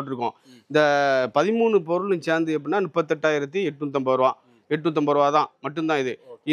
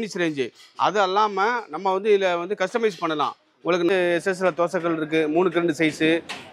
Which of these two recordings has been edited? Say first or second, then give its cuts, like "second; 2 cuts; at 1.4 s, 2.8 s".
second; 1 cut; at 3.9 s